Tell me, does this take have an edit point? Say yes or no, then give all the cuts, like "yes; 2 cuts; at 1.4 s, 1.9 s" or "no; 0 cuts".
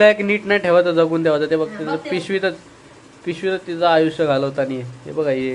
no; 0 cuts